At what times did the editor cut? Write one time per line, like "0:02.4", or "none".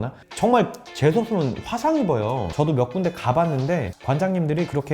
0:02.5